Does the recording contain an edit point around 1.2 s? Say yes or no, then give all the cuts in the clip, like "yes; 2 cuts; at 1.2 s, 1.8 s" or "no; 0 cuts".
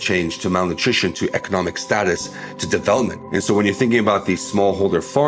no; 1 cut; at 3.2 s